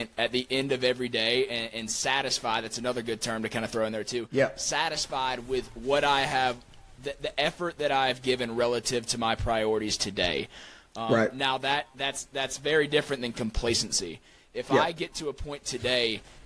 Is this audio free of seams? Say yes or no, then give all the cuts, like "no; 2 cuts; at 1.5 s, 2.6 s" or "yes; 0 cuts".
yes; 0 cuts